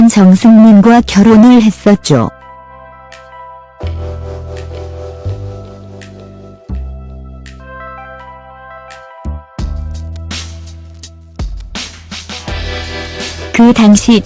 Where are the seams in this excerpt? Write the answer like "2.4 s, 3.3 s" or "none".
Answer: 13.4 s